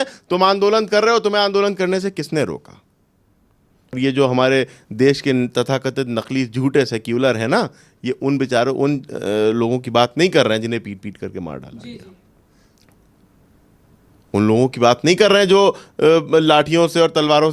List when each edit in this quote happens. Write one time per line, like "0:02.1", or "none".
0:04.0